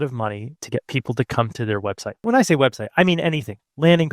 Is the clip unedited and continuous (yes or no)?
no